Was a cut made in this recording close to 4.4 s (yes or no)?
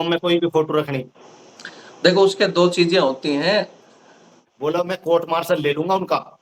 yes